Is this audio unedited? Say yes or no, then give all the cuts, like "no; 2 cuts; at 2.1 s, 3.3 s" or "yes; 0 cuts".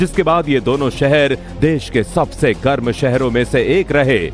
yes; 0 cuts